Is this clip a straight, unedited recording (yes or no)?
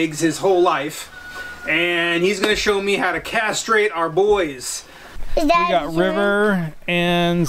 no